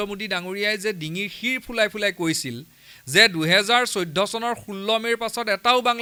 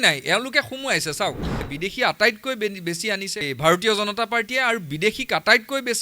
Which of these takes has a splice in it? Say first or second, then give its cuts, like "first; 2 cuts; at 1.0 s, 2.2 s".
second; 2 cuts; at 1.6 s, 3.4 s